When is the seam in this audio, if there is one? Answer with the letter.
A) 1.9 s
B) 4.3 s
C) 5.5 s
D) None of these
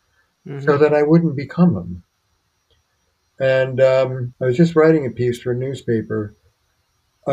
B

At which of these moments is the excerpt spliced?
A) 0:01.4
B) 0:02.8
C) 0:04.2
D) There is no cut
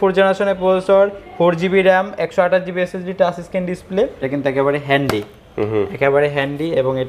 C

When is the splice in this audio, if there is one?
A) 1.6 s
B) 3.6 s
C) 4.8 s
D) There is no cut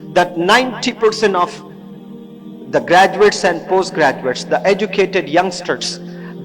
D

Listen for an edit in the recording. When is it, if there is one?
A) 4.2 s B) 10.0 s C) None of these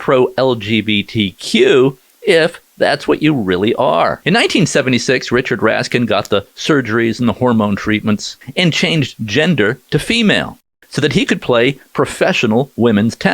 A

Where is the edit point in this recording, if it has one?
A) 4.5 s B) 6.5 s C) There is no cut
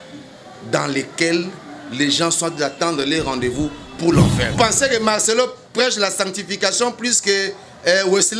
A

